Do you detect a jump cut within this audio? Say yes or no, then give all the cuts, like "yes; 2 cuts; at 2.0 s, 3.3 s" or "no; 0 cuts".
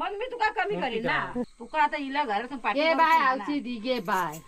yes; 1 cut; at 1.5 s